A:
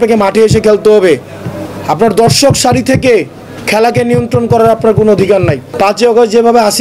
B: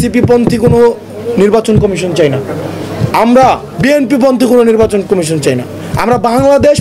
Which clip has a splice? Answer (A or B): A